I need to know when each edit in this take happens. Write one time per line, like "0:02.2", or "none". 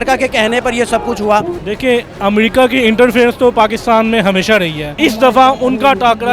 0:01.6
0:04.9